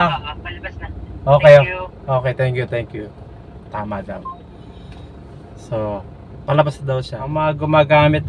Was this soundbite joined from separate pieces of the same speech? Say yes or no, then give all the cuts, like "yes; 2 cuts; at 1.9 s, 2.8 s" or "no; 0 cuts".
yes; 1 cut; at 7.2 s